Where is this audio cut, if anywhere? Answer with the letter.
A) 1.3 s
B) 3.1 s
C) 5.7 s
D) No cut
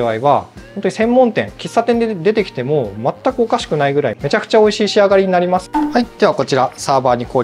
C